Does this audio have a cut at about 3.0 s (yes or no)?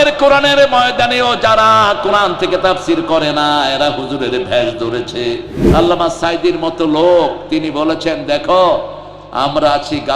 no